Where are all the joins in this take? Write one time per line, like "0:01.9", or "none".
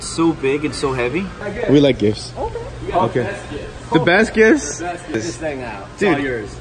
0:01.4
0:05.1

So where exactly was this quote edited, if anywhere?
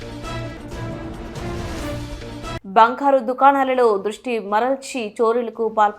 0:02.6

